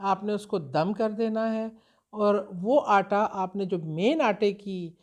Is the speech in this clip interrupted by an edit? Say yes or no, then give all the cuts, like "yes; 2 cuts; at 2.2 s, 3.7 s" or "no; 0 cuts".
no; 0 cuts